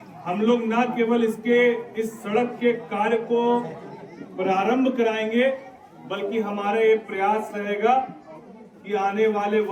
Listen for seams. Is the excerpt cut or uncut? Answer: uncut